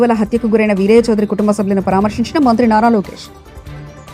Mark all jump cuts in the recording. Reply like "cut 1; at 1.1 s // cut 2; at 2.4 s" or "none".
none